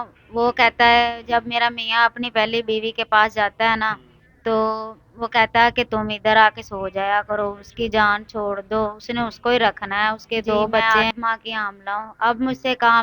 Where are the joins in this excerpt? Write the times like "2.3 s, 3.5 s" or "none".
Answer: 10.8 s